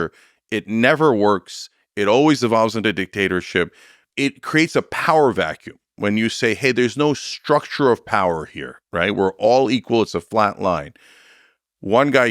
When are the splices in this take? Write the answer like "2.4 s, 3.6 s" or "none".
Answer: 3.9 s

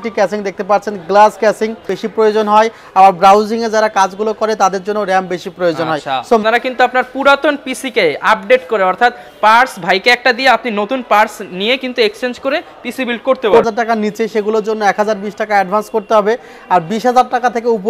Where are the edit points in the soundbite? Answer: 2.0 s, 6.4 s, 13.7 s

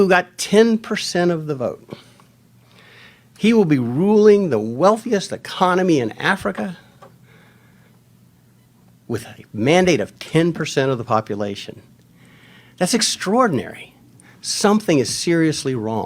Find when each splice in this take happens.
none

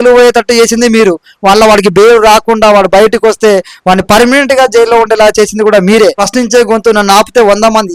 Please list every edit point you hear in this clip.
6.2 s

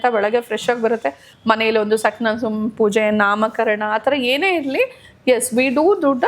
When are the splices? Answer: 1.3 s

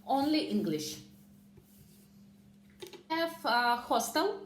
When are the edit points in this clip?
3.1 s

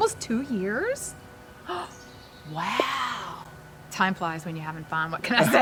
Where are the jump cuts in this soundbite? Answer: none

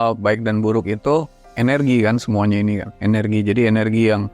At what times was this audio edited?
1.4 s

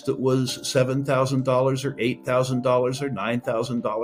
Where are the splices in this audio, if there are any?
none

